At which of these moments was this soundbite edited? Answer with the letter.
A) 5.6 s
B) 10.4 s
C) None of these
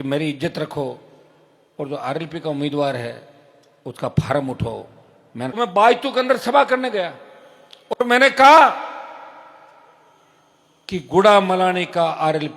A